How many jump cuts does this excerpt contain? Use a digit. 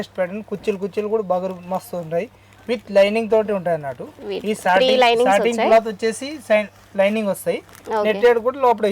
0